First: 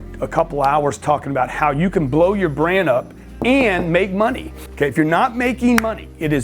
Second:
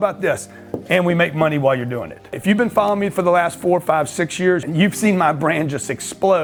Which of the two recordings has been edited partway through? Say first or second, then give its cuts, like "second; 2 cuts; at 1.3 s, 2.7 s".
first; 1 cut; at 4.4 s